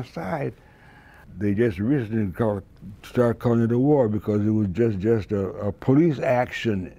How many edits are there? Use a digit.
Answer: 1